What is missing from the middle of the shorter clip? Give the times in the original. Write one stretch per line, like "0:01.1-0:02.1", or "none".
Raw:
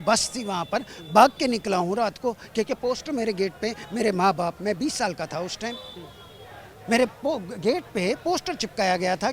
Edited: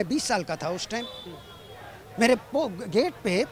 none